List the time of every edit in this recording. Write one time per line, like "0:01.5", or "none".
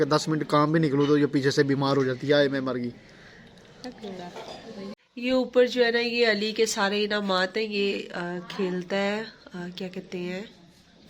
0:04.9